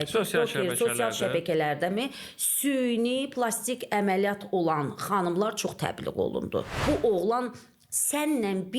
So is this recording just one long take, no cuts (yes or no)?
no